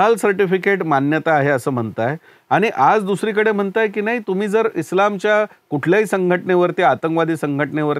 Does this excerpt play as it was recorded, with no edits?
yes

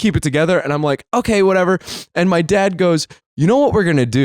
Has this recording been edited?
yes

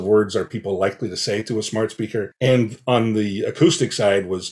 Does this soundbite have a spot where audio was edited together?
yes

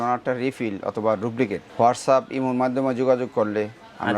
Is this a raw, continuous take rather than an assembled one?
no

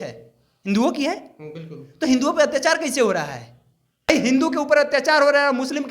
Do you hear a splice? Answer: yes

